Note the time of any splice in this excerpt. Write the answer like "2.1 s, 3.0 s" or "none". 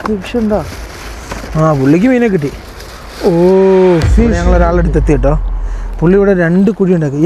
4.4 s